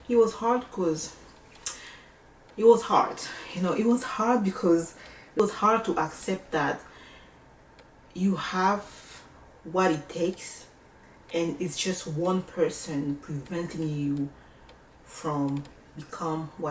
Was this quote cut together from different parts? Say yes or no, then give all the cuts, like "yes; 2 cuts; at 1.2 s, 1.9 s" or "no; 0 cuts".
no; 0 cuts